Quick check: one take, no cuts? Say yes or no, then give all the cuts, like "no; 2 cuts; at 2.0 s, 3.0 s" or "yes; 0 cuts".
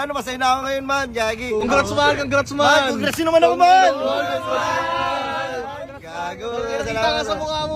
no; 1 cut; at 1.6 s